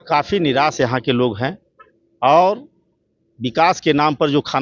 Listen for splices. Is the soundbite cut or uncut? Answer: uncut